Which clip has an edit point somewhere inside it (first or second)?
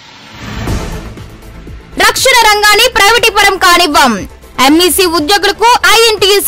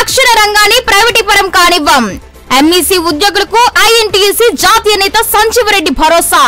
first